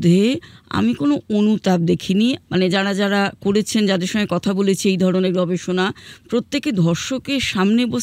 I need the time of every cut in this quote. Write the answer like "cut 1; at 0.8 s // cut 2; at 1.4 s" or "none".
cut 1; at 2.4 s